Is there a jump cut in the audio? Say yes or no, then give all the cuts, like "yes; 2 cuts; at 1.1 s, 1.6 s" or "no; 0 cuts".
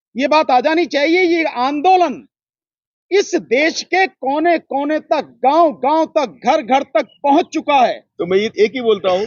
yes; 1 cut; at 8.1 s